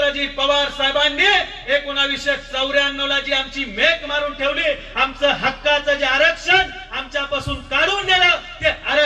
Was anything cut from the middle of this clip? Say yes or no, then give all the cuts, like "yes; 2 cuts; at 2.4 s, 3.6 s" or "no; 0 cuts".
no; 0 cuts